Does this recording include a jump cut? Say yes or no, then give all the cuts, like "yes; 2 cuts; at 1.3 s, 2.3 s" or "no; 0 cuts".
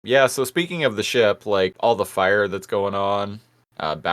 yes; 1 cut; at 1.7 s